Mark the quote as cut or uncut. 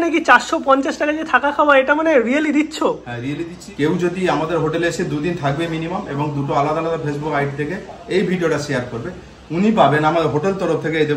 cut